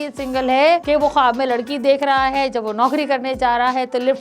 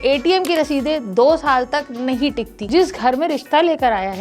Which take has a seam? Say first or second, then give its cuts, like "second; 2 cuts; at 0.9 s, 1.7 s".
second; 1 cut; at 2.6 s